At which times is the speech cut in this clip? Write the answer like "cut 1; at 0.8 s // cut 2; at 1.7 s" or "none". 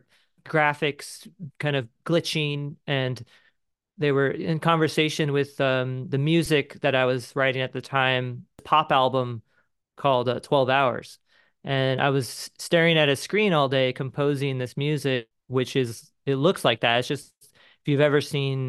cut 1; at 8.6 s